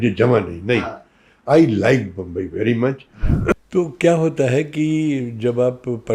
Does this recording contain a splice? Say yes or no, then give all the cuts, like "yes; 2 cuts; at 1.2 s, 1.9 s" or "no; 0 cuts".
yes; 1 cut; at 3.5 s